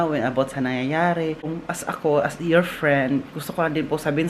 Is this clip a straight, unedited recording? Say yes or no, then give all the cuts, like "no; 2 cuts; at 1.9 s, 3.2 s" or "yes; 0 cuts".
no; 1 cut; at 1.6 s